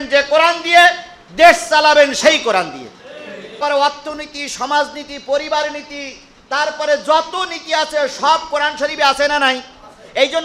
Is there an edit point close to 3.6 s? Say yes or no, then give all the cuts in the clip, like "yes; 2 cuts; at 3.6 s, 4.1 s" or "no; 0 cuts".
yes; 1 cut; at 3.6 s